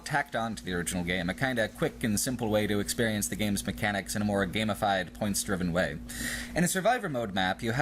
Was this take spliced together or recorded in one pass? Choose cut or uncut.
cut